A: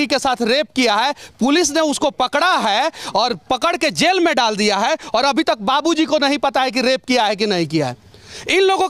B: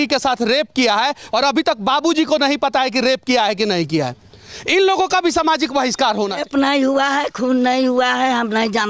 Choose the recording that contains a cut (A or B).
B